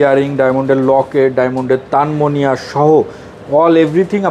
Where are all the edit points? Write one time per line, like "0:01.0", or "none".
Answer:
none